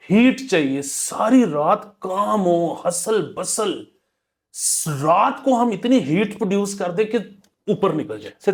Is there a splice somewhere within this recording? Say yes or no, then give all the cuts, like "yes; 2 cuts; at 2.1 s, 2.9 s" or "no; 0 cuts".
no; 0 cuts